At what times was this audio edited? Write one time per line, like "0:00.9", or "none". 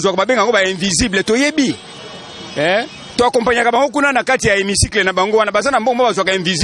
none